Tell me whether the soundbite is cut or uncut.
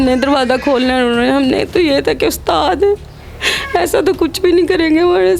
uncut